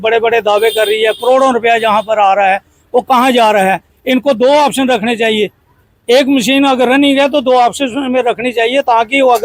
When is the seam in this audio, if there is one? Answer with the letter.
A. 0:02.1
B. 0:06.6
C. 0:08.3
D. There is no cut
D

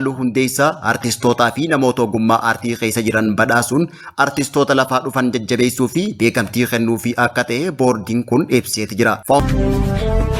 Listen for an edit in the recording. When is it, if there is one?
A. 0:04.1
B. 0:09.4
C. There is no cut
B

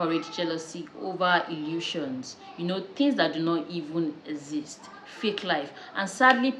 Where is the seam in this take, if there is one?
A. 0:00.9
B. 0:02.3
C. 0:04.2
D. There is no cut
D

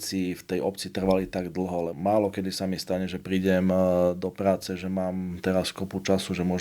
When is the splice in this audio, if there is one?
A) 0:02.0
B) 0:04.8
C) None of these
A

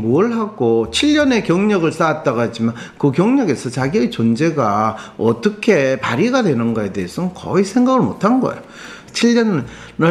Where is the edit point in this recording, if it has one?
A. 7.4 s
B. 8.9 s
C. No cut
B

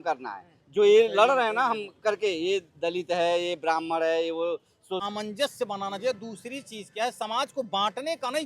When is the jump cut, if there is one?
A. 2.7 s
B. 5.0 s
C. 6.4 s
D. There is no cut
B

